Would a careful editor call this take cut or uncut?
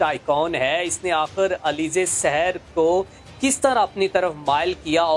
uncut